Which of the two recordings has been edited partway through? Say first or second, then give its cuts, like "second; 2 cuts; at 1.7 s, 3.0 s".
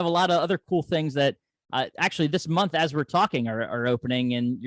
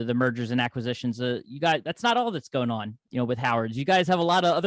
second; 1 cut; at 3.0 s